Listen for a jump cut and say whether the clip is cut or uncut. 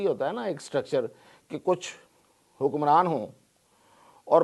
uncut